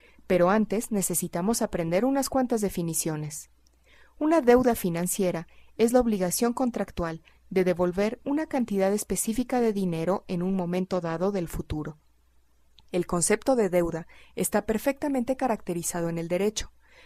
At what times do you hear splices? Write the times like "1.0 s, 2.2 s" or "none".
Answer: none